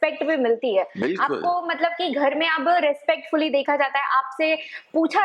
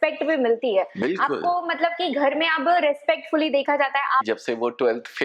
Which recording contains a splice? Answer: second; 1 cut; at 4.2 s

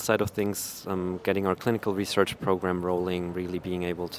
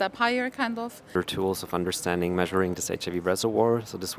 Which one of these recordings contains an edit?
second; 1 cut; at 1.1 s

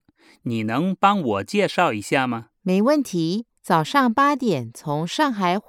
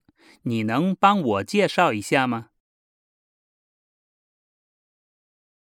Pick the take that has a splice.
first; 1 cut; at 2.5 s

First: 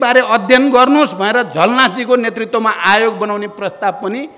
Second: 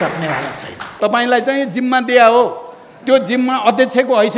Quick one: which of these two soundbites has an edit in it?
second; 1 cut; at 0.9 s

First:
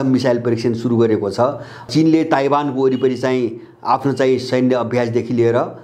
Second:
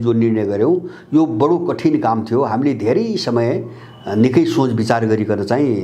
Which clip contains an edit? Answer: first; 1 cut; at 1.8 s

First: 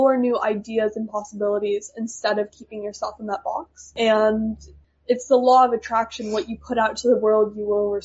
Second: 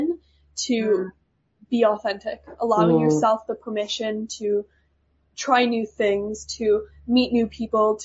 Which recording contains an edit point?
first; 2 cuts; at 3.9 s, 4.8 s

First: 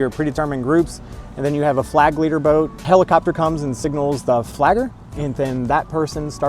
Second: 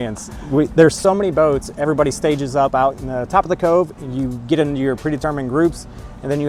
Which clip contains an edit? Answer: first; 2 cuts; at 2.8 s, 4.5 s

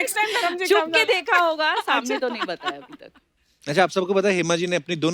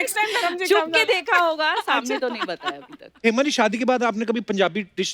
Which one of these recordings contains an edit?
second; 1 cut; at 3.2 s

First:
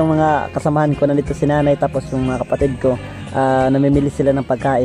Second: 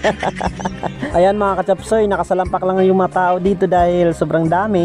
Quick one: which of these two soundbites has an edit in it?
second; 1 cut; at 0.9 s

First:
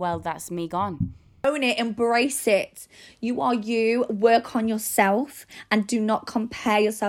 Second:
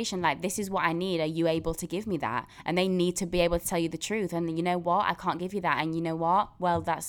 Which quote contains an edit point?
first; 1 cut; at 1.4 s

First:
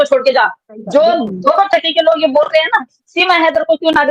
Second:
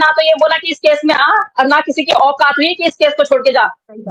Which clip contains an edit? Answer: first; 1 cut; at 3.1 s

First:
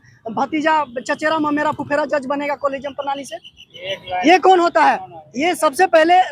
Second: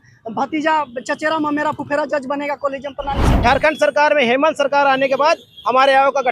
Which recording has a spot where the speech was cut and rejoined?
second; 1 cut; at 3.2 s

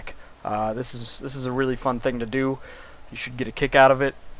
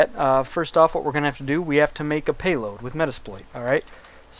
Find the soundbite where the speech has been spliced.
second; 1 cut; at 1.6 s

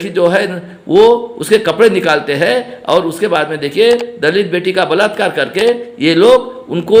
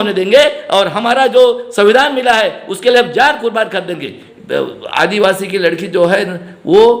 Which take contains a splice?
second; 1 cut; at 4.3 s

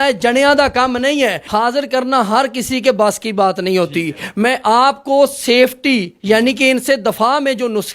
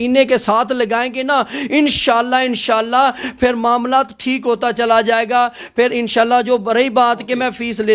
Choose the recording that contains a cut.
first; 1 cut; at 1.4 s

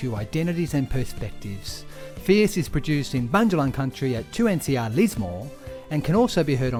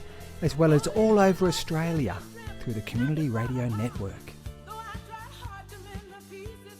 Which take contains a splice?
second; 1 cut; at 4.1 s

